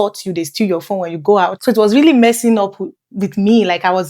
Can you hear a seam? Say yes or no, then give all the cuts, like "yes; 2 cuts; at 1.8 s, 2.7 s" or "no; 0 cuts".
yes; 1 cut; at 1.6 s